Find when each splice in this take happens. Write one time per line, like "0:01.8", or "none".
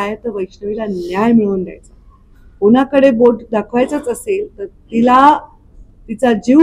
none